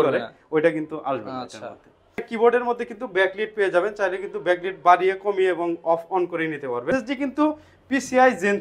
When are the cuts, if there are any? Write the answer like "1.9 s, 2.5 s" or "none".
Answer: 2.3 s, 6.9 s

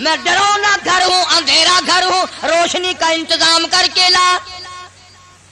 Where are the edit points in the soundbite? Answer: none

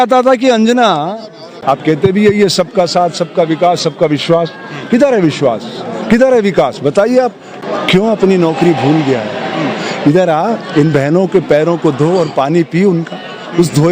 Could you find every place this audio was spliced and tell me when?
1.5 s, 7.5 s

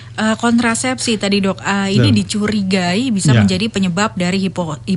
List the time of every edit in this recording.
none

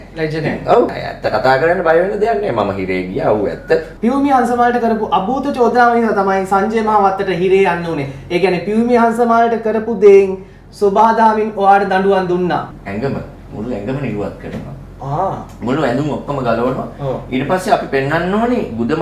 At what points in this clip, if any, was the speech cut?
1.0 s, 3.9 s, 12.8 s

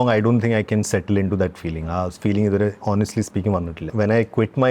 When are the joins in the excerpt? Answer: 3.8 s

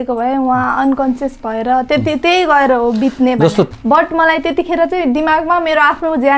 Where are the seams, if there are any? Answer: 3.7 s

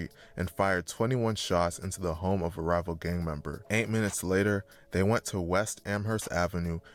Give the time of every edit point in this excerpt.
none

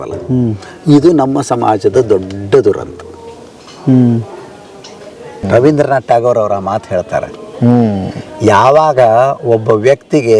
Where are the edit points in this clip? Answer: 5.4 s

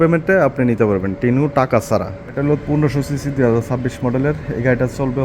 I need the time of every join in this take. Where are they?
2.4 s

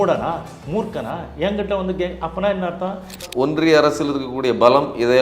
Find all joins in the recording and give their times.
3.2 s

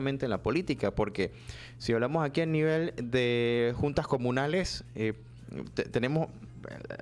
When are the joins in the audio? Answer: none

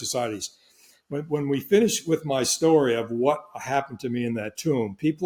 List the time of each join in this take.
none

